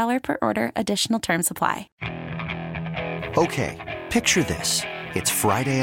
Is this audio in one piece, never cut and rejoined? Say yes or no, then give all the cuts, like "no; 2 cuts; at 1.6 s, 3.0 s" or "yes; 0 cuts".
no; 1 cut; at 1.9 s